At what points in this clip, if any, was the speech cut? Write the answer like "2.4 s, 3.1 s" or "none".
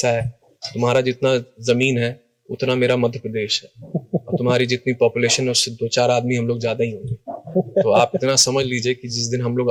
none